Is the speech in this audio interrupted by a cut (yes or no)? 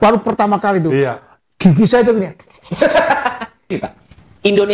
yes